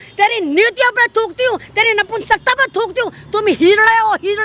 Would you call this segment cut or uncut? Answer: uncut